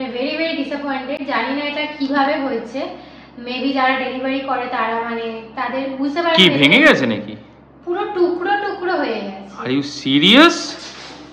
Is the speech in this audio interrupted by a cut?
no; 0 cuts

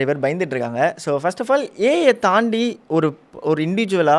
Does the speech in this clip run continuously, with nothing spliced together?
yes; 0 cuts

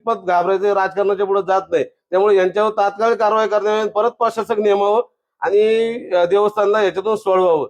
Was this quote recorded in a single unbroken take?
yes; 0 cuts

